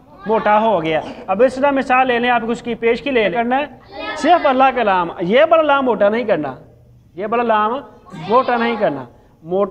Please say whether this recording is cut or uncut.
cut